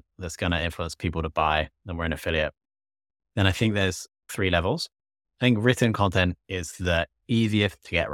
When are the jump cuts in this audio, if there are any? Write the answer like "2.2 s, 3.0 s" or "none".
4.3 s